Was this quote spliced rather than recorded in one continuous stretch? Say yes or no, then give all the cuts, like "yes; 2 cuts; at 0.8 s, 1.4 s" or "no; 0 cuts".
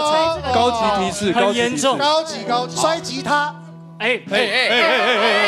yes; 1 cut; at 2.7 s